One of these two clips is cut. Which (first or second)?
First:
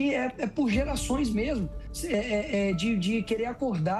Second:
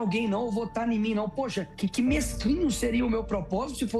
second